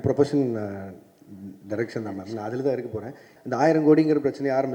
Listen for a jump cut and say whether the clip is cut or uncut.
cut